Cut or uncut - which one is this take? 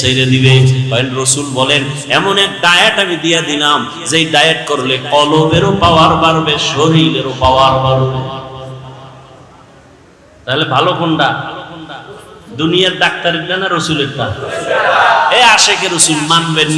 uncut